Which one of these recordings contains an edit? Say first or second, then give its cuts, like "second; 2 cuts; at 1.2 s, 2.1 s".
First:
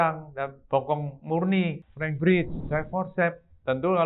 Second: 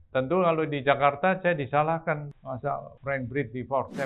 first; 2 cuts; at 1.9 s, 2.5 s